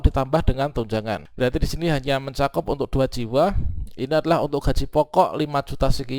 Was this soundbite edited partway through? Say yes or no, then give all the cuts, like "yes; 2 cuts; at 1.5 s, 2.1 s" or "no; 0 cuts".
yes; 1 cut; at 1.3 s